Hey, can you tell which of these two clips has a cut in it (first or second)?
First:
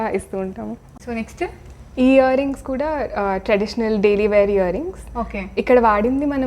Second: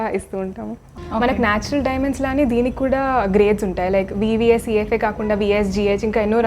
second